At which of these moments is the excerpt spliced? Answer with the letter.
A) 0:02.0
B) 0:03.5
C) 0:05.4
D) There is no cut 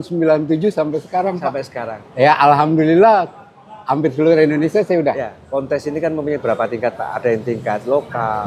D